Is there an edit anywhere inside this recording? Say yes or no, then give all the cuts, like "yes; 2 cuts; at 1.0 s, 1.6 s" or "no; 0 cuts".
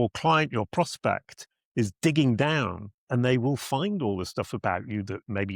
no; 0 cuts